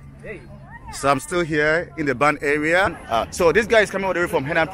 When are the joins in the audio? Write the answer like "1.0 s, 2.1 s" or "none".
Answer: 3.0 s